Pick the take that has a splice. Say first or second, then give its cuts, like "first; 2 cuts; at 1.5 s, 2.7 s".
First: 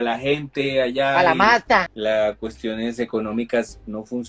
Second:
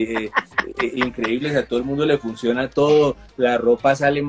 first; 1 cut; at 1.9 s